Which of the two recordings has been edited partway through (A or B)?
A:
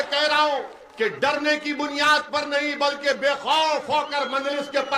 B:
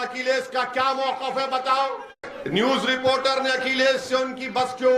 B